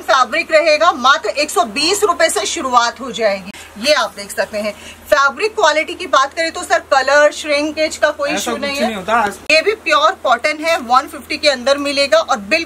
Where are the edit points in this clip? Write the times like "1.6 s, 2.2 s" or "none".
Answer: 3.6 s, 9.4 s